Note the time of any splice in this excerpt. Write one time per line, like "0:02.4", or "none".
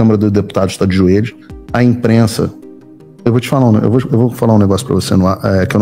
none